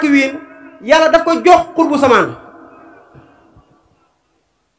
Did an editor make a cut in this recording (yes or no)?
no